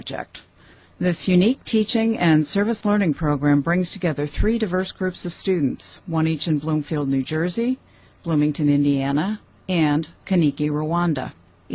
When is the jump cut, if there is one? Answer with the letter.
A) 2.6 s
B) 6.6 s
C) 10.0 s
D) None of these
C